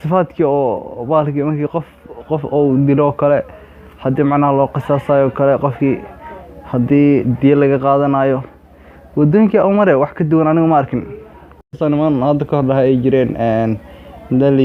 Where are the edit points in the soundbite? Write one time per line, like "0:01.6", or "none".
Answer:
0:11.8

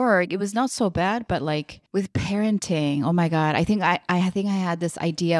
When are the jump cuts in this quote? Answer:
none

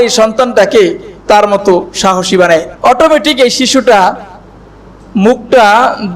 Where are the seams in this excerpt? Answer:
0:02.7

